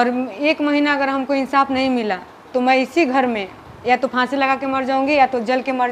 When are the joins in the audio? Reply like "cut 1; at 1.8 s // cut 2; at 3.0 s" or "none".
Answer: none